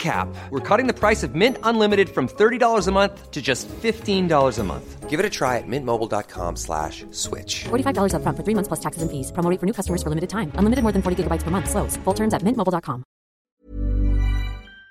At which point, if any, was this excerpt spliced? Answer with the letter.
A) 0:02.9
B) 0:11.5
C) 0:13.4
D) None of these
C